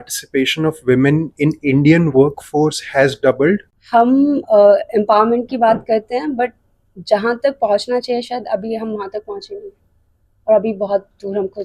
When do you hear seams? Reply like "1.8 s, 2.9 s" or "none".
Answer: 3.7 s